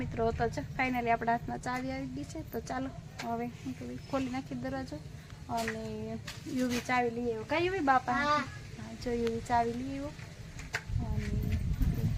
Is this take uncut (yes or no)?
yes